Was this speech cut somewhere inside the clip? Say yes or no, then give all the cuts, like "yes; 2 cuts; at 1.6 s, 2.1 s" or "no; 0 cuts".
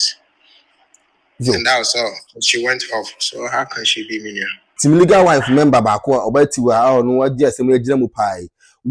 yes; 1 cut; at 4.6 s